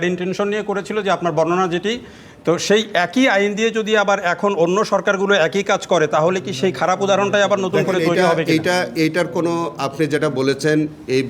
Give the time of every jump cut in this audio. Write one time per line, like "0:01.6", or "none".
none